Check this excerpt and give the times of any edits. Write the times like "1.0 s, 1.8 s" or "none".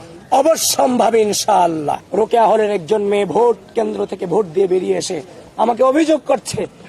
2.0 s